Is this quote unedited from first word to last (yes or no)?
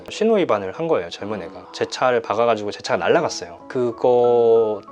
no